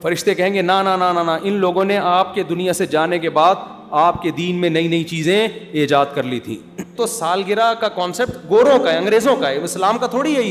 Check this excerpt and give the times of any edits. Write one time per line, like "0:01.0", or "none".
0:06.9